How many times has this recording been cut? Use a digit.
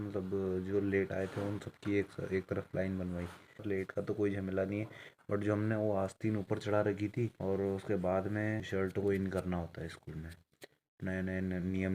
3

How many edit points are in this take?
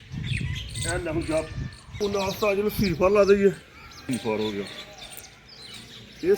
2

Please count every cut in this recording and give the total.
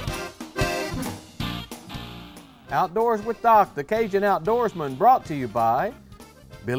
0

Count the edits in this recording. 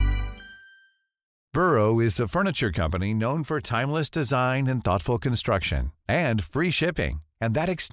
1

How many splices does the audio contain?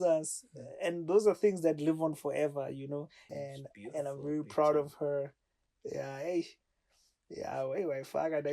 1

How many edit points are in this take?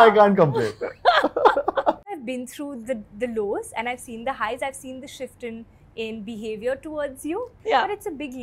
2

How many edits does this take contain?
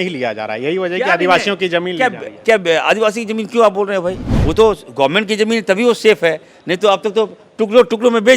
1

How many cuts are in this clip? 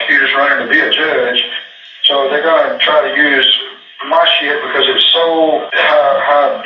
1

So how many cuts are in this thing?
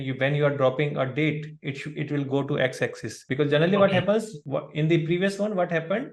0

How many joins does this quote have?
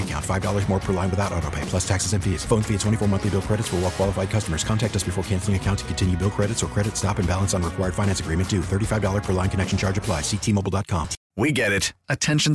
1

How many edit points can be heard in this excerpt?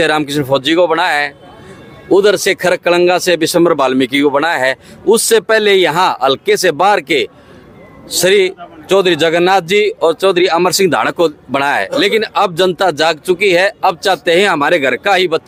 0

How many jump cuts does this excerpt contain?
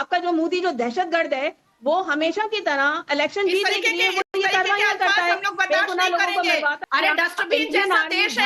1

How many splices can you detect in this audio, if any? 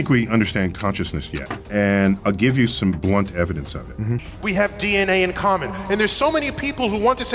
1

